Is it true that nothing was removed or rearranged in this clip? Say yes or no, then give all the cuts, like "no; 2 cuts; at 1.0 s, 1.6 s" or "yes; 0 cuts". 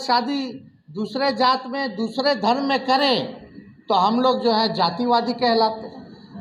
yes; 0 cuts